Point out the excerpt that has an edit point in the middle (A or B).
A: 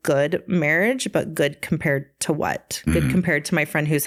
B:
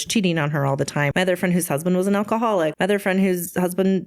B